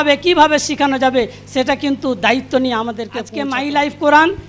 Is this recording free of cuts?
no; 1 cut; at 3.3 s

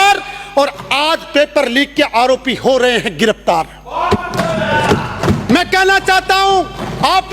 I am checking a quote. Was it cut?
no; 0 cuts

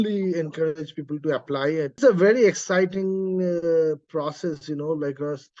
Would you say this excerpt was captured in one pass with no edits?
no; 1 cut; at 2.0 s

